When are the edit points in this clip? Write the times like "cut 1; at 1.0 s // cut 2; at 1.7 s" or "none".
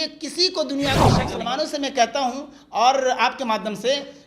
cut 1; at 1.2 s